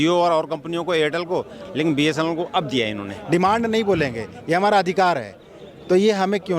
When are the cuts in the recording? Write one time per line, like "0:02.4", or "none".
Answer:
0:03.1